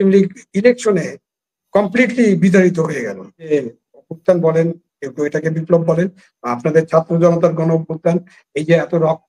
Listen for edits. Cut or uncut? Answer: cut